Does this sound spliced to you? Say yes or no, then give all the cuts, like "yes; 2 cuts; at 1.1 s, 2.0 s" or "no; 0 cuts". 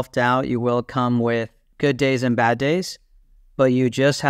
yes; 1 cut; at 1.6 s